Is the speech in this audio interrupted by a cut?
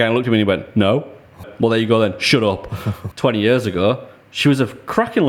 yes; 2 cuts; at 1.4 s, 2.9 s

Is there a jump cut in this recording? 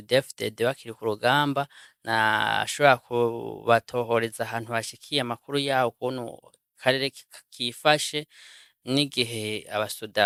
no; 0 cuts

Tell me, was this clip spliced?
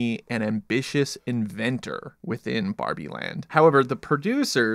yes; 2 cuts; at 2.1 s, 3.5 s

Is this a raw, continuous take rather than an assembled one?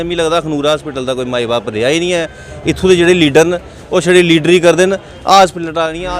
yes; 0 cuts

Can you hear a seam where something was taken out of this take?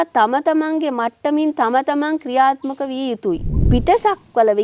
yes; 1 cut; at 3.5 s

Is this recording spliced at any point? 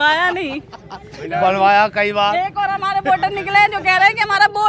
no; 0 cuts

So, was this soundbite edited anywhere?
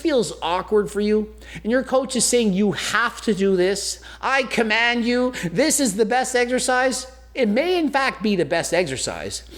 no; 0 cuts

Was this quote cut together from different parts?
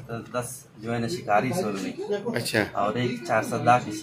no; 0 cuts

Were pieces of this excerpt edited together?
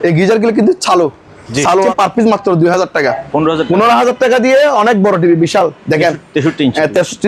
yes; 2 cuts; at 1.9 s, 3.0 s

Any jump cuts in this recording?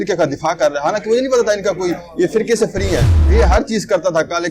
yes; 1 cut; at 3.1 s

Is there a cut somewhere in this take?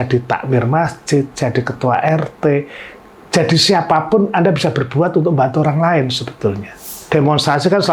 yes; 1 cut; at 6.9 s

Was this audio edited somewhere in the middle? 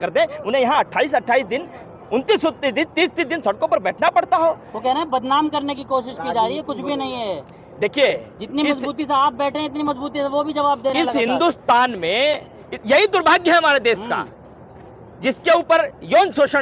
no; 0 cuts

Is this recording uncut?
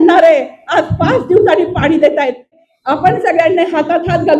no; 1 cut; at 2.6 s

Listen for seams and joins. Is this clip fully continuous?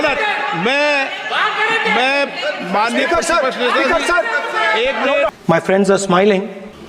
no; 1 cut; at 5.4 s

